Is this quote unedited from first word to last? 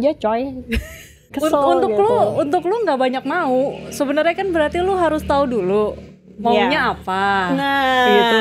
no; 1 cut; at 1.2 s

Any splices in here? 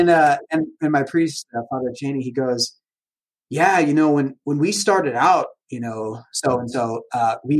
no; 0 cuts

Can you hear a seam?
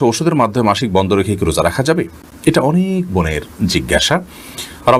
no; 0 cuts

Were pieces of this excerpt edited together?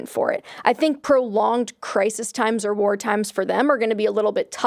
no; 0 cuts

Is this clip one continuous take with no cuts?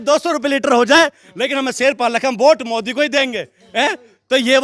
yes; 0 cuts

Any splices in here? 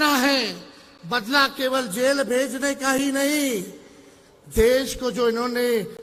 no; 0 cuts

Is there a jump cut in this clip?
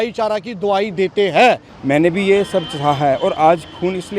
yes; 1 cut; at 1.7 s

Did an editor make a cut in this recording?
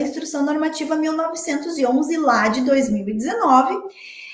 no; 0 cuts

